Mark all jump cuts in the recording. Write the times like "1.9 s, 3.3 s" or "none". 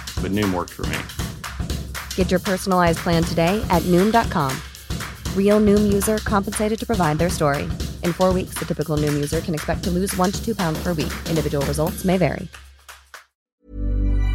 13.4 s